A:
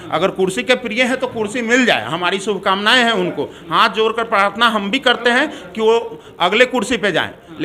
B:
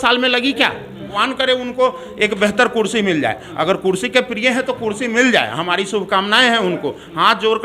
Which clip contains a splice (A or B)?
B